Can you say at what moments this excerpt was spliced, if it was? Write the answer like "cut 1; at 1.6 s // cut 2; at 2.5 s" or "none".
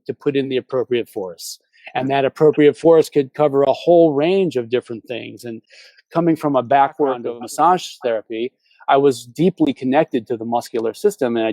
cut 1; at 7.2 s